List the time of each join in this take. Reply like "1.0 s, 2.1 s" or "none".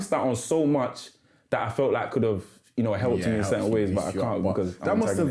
none